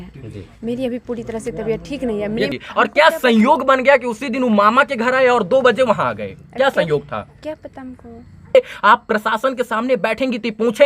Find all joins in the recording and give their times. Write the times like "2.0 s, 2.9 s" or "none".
2.6 s, 8.5 s